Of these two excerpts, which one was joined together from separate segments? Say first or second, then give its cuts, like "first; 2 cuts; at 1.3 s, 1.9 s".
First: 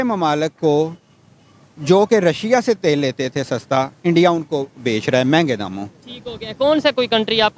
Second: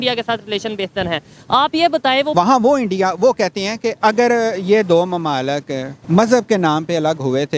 second; 3 cuts; at 2.3 s, 4.0 s, 5.9 s